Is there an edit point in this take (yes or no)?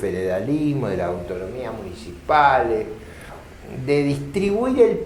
no